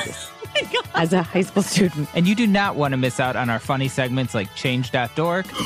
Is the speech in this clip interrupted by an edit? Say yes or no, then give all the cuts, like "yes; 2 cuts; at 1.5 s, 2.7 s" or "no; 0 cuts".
yes; 1 cut; at 2.0 s